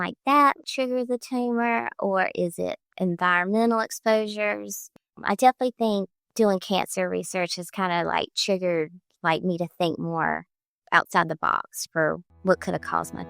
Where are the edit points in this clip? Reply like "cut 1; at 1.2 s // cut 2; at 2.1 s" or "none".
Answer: cut 1; at 4.9 s